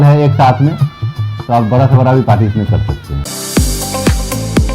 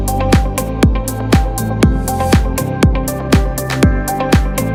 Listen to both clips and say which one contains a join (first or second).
first